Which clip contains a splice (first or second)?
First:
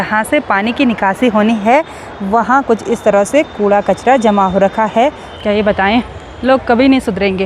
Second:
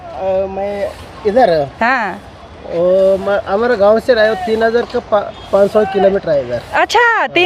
first